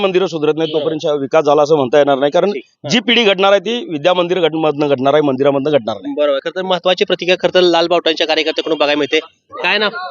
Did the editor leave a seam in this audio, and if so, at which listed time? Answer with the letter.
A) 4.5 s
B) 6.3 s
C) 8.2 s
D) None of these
D